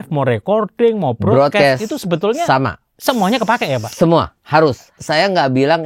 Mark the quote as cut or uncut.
cut